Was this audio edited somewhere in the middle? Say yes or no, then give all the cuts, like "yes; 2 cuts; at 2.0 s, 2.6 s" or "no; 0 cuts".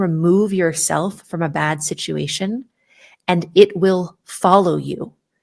no; 0 cuts